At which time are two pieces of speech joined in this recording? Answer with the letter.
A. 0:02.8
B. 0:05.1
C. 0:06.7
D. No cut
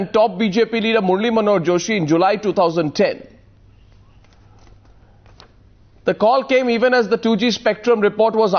A